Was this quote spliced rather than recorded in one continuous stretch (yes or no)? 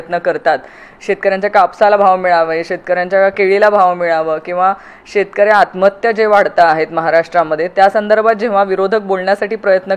no